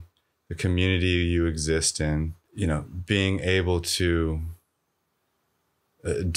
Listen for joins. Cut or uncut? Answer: cut